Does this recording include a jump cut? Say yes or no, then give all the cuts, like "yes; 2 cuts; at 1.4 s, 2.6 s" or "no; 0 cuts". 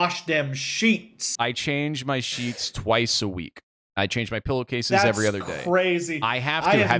yes; 1 cut; at 1.2 s